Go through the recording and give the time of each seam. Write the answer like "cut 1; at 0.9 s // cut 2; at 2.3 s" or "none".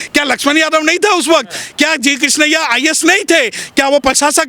none